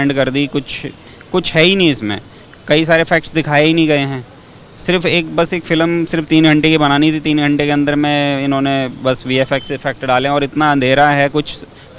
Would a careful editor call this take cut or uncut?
uncut